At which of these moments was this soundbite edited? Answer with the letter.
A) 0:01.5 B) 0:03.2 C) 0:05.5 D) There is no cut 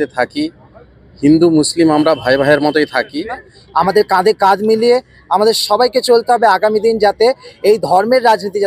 B